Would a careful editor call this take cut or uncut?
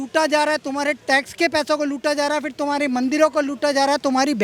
uncut